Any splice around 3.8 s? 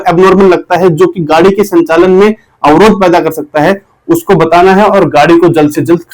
no; 0 cuts

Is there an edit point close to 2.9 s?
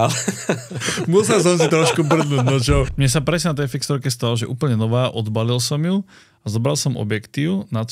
yes; 1 cut; at 2.9 s

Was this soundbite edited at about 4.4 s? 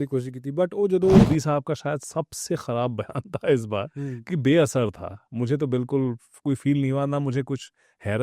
no; 1 cut; at 1.2 s

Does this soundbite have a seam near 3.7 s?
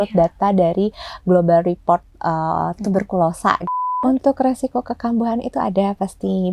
yes; 1 cut; at 3.7 s

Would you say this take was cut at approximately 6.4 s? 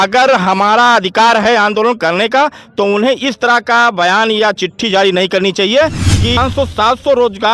yes; 1 cut; at 6.4 s

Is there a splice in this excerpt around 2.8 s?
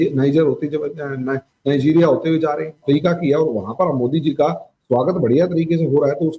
yes; 1 cut; at 2.8 s

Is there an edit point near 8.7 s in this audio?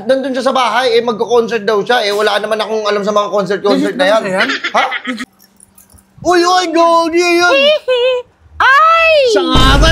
no; 1 cut; at 5.2 s

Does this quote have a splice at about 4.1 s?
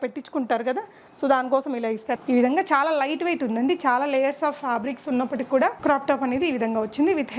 no; 2 cuts; at 2.1 s, 5.8 s

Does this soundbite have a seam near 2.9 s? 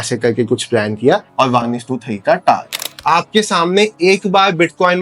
yes; 2 cuts; at 1.3 s, 2.9 s

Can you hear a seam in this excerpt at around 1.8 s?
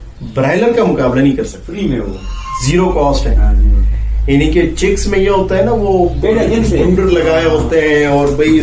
yes; 1 cut; at 1.8 s

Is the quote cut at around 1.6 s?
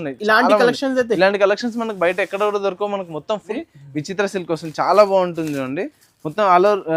no; 1 cut; at 3.6 s

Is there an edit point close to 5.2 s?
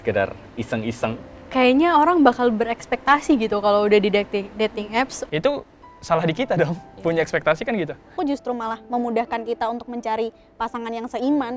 yes; 3 cuts; at 1.3 s, 5.2 s, 8.1 s

